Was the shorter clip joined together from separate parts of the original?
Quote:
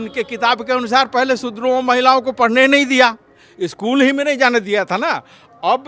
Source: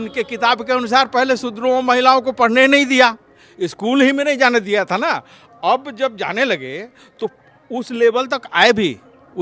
no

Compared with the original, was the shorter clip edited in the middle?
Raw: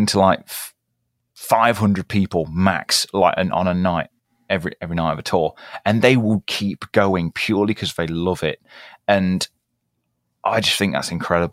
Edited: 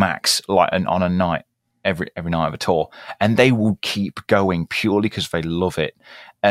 no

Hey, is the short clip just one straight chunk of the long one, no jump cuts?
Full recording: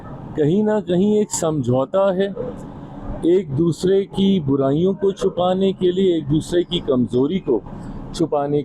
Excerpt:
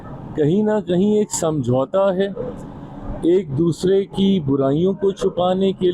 yes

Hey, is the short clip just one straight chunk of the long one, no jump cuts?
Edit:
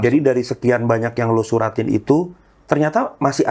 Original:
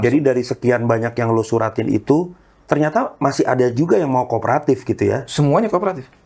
yes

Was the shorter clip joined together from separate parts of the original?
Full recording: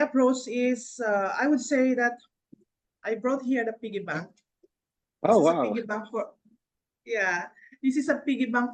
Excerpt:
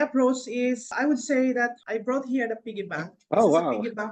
yes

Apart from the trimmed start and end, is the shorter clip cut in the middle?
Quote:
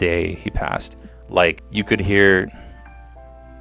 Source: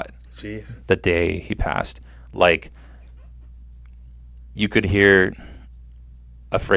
yes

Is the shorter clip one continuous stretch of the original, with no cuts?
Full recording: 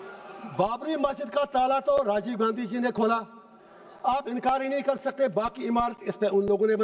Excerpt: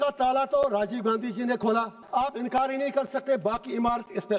no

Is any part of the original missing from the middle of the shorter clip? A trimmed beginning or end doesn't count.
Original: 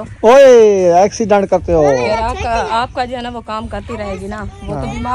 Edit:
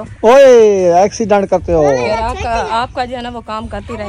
no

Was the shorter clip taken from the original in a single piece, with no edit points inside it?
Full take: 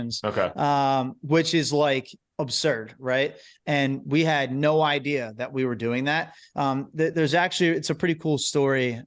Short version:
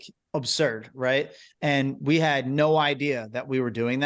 yes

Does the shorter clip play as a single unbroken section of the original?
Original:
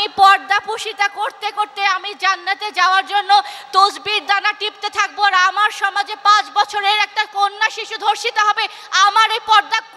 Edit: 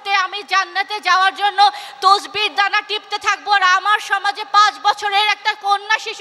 yes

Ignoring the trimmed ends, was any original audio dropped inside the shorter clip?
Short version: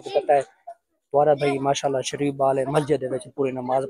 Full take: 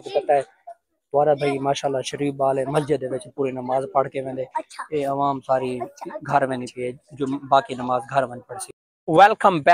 no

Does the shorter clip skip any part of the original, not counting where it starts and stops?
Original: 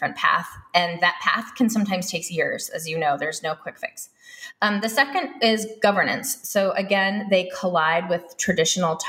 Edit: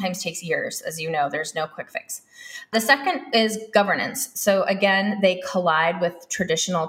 yes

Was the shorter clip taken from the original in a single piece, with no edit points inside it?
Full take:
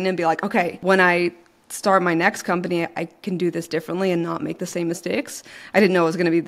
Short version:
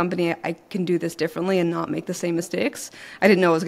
yes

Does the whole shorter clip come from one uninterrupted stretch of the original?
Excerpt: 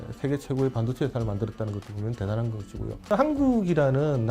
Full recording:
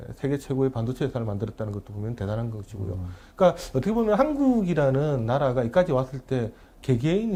no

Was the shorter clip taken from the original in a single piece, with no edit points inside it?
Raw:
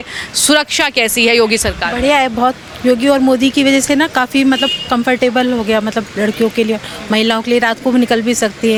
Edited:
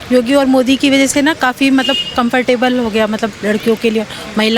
yes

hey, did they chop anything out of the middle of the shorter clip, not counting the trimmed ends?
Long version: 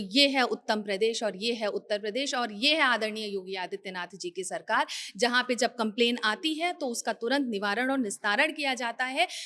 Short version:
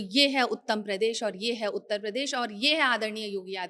no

